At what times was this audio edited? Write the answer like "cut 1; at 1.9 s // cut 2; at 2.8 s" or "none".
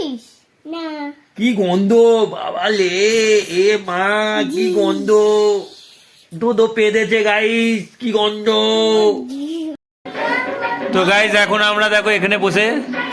none

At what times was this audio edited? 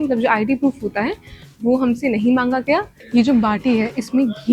cut 1; at 3.0 s

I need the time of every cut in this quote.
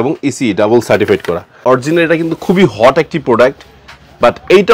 cut 1; at 1.5 s

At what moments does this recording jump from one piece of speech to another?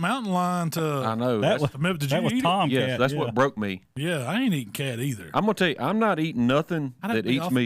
none

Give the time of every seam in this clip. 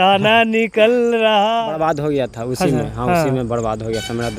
cut 1; at 1.7 s

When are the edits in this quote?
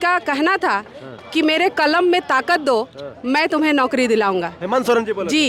none

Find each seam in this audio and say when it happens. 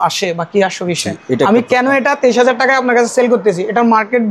none

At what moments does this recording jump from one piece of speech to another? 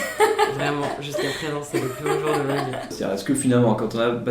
cut 1; at 2.9 s

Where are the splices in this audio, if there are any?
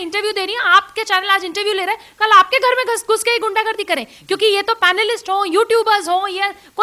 none

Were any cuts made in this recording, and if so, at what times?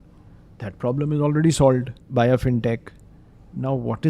cut 1; at 2.0 s

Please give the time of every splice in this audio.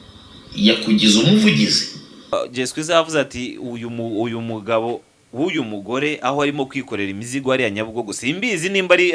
cut 1; at 2.3 s

